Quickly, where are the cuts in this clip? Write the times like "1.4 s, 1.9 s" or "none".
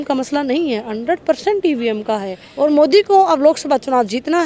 2.4 s